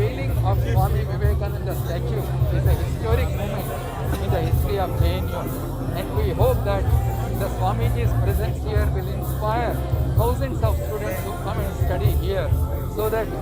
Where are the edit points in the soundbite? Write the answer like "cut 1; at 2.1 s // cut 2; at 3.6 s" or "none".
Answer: none